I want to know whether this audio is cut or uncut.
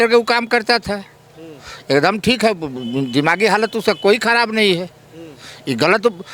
uncut